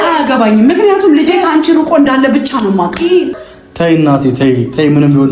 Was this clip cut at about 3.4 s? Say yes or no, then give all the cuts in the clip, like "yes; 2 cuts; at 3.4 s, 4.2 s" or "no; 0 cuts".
yes; 1 cut; at 3.4 s